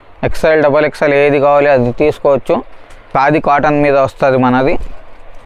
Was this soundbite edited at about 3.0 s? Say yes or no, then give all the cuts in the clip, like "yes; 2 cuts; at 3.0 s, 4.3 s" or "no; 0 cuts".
yes; 1 cut; at 3.0 s